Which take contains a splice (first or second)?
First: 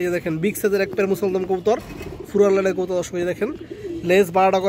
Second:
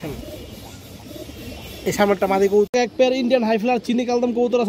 second